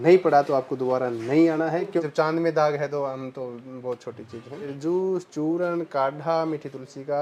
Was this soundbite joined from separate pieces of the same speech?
yes; 2 cuts; at 2.0 s, 4.7 s

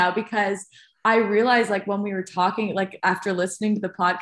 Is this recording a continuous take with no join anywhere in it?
yes; 0 cuts

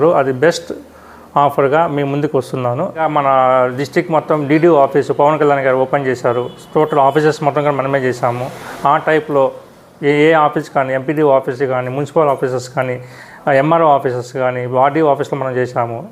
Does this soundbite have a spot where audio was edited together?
yes; 1 cut; at 3.0 s

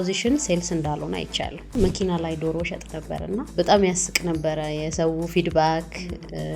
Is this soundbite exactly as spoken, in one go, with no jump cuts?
no; 2 cuts; at 1.7 s, 3.5 s

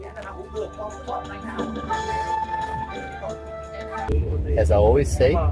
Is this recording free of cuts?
no; 1 cut; at 4.1 s

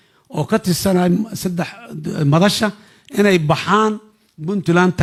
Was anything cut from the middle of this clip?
no; 0 cuts

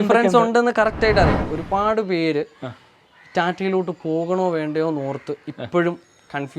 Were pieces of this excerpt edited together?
yes; 1 cut; at 1.5 s

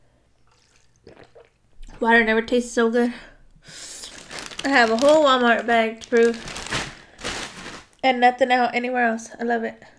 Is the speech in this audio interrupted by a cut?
no; 0 cuts

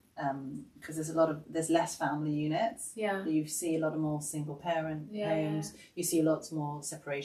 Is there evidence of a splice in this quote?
no; 0 cuts

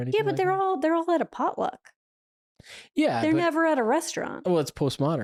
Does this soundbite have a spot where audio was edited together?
no; 0 cuts

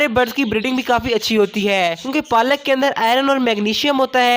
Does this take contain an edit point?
yes; 1 cut; at 2.0 s

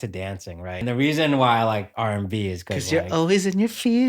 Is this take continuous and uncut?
no; 2 cuts; at 0.8 s, 1.9 s

